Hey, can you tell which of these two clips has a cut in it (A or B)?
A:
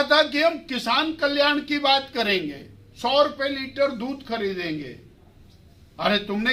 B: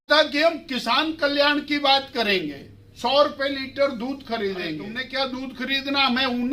B